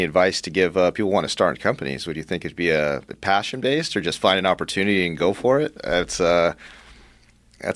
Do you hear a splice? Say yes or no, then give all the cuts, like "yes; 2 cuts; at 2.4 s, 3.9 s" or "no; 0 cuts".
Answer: no; 0 cuts